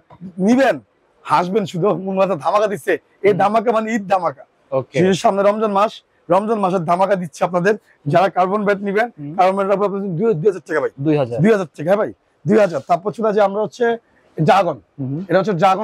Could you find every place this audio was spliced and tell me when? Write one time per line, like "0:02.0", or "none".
none